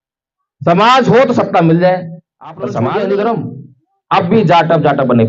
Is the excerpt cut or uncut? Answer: cut